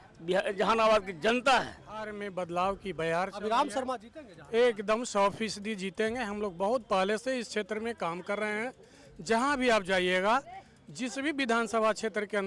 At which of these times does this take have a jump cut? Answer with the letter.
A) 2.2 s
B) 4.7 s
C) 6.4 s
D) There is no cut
A